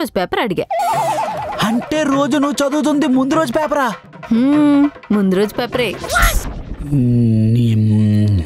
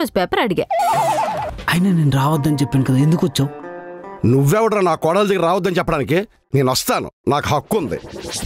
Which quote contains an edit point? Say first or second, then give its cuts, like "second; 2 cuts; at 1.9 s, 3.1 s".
second; 1 cut; at 1.5 s